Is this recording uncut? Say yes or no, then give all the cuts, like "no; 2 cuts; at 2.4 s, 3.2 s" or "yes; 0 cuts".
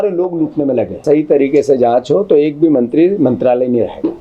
no; 1 cut; at 1.0 s